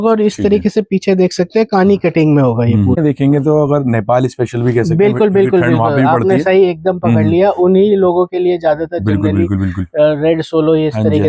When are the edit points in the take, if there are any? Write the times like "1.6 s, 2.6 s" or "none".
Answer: 3.0 s